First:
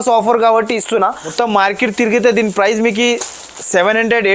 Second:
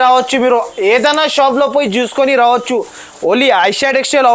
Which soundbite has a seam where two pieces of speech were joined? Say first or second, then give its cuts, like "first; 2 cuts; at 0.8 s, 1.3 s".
first; 1 cut; at 1.2 s